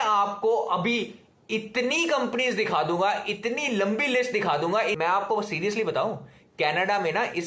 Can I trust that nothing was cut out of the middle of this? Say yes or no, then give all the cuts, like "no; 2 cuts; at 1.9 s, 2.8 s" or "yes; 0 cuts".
no; 1 cut; at 5.0 s